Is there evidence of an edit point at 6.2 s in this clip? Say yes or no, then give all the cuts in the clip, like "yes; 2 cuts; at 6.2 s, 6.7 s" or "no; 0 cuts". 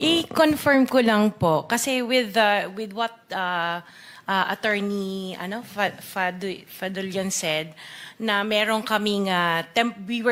no; 0 cuts